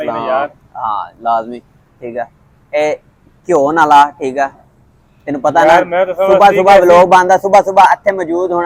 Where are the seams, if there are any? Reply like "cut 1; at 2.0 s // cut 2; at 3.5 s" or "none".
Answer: none

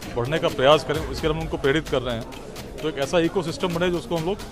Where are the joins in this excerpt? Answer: none

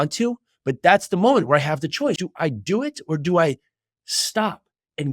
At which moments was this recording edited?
cut 1; at 2.2 s

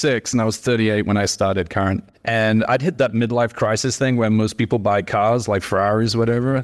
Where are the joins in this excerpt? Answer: none

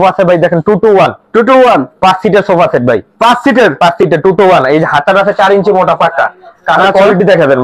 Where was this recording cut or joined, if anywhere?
none

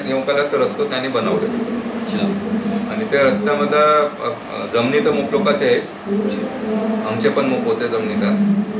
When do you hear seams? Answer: none

